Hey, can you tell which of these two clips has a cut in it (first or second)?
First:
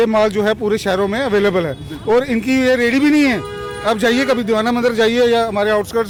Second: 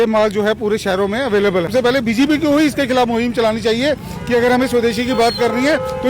second